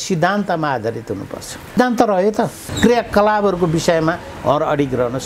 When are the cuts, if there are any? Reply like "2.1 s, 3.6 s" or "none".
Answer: 1.8 s, 2.6 s